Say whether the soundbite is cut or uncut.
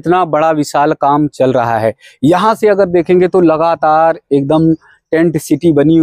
uncut